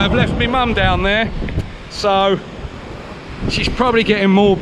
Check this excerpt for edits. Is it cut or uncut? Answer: uncut